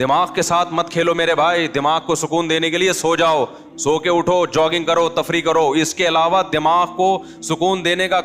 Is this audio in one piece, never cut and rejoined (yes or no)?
yes